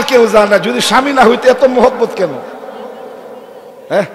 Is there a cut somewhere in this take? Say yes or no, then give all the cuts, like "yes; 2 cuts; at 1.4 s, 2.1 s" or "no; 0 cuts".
no; 0 cuts